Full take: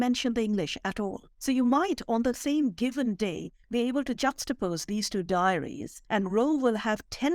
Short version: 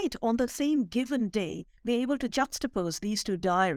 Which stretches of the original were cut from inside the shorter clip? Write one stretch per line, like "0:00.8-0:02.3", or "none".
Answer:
none